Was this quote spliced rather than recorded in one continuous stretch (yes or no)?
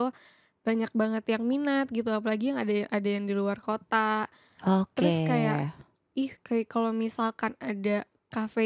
no